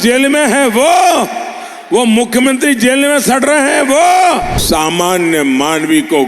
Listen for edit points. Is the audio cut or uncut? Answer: cut